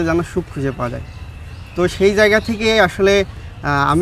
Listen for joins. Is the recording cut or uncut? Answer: uncut